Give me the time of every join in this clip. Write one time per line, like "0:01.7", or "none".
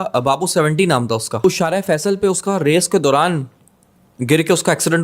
0:01.4